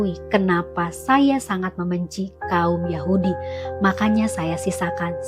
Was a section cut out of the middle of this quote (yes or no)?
no